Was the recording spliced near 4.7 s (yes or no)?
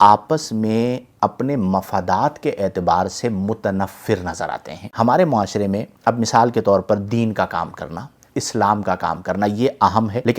yes